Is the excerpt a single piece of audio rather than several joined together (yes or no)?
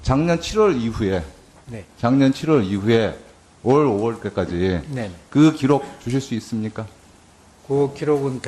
no